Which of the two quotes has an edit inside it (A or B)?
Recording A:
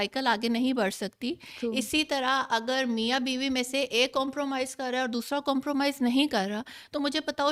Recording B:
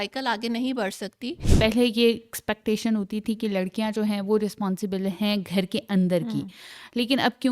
B